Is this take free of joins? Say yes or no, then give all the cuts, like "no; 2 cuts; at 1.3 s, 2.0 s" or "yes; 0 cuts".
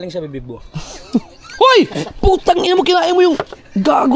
yes; 0 cuts